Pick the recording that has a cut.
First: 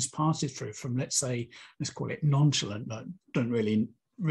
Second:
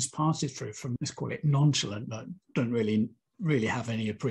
second; 1 cut; at 0.9 s

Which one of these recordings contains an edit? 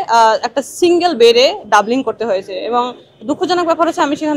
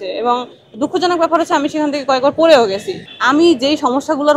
second; 1 cut; at 3.0 s

